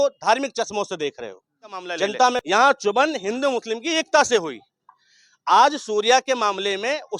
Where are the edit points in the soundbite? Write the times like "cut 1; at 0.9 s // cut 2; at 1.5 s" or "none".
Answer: cut 1; at 2.4 s